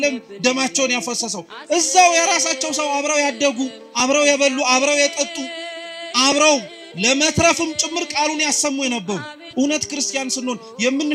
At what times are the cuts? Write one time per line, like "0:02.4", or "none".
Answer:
0:09.4

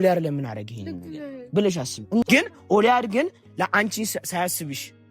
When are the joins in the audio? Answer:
0:02.2

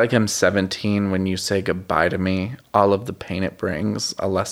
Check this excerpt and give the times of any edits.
none

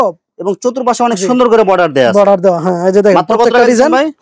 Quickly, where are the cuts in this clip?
none

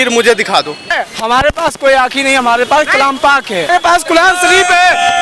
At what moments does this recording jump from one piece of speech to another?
0:00.9
0:03.7

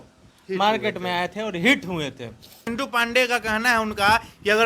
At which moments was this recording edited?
0:02.7

